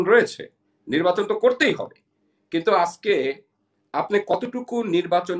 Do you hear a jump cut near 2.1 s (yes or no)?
no